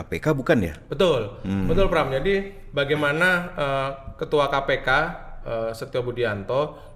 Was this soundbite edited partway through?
no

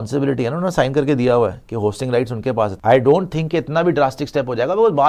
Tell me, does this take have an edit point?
yes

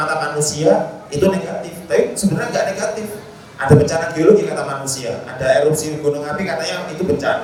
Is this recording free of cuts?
yes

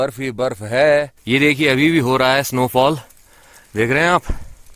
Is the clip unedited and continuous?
no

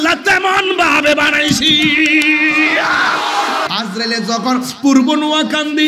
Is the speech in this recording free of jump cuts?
no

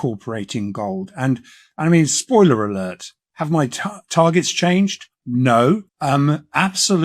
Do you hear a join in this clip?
yes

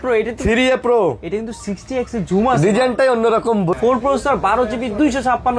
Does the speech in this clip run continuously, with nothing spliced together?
no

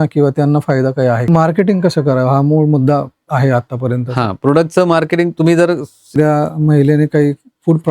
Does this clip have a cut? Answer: yes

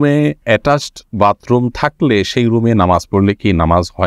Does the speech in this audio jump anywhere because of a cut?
no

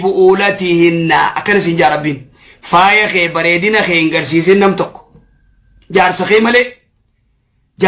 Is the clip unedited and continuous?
yes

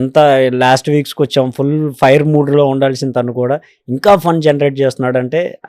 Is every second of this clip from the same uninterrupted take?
yes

